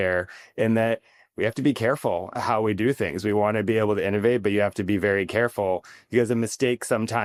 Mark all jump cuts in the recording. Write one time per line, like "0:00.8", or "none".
none